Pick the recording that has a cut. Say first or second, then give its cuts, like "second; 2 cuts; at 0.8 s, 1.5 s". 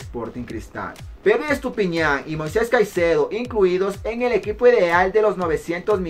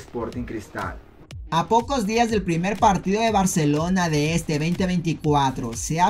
first; 1 cut; at 1.0 s